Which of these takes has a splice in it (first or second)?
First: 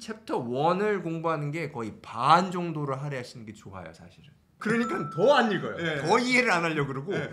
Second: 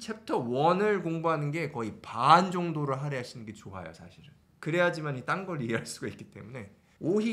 first